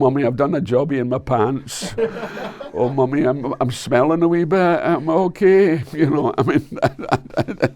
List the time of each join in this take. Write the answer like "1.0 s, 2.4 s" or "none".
none